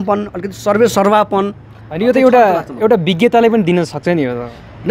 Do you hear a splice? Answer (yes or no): no